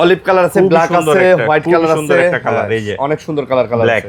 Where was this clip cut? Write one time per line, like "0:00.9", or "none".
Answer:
none